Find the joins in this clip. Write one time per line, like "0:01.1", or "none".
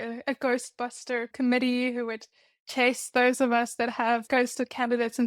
0:01.3
0:04.2